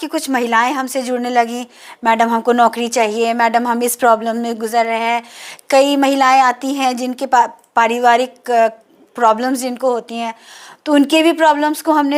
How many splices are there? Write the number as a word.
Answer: zero